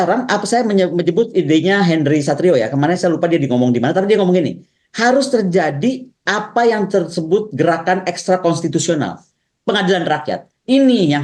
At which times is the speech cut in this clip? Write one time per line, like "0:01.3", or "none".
none